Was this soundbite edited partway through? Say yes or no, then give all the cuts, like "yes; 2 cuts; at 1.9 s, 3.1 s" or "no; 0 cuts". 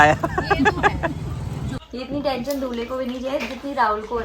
yes; 1 cut; at 1.9 s